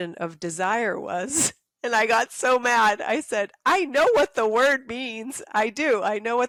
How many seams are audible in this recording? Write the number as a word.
zero